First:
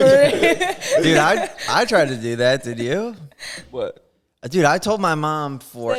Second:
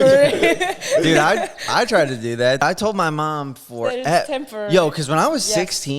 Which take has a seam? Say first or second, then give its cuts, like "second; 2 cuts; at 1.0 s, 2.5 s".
second; 1 cut; at 2.6 s